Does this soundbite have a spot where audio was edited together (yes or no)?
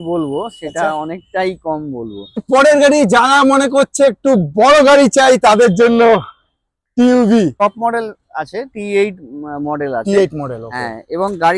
yes